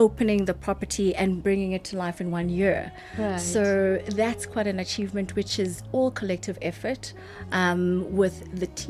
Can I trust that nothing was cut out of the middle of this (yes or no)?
yes